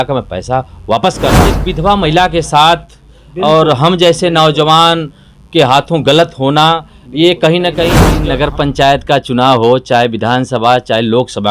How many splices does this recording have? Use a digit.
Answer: 2